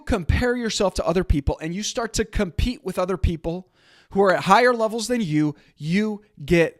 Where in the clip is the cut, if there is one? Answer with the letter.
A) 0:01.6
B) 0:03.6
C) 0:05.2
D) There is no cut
D